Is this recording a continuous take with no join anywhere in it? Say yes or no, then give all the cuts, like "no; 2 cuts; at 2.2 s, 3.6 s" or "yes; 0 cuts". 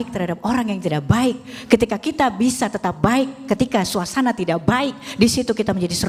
yes; 0 cuts